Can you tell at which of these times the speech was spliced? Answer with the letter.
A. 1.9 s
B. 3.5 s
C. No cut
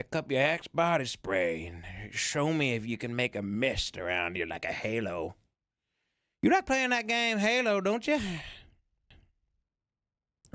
C